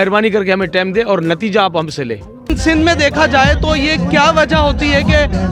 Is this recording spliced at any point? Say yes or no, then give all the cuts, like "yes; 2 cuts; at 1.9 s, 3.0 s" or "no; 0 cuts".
yes; 1 cut; at 2.6 s